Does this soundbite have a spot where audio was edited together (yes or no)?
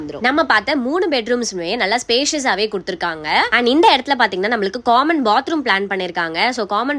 no